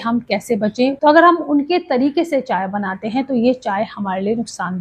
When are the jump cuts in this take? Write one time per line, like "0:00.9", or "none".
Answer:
0:00.9